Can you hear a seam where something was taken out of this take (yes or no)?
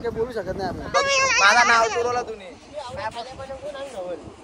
yes